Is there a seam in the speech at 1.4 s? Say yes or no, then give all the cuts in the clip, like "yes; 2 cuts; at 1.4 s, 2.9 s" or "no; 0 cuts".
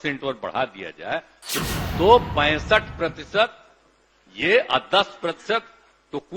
yes; 1 cut; at 1.4 s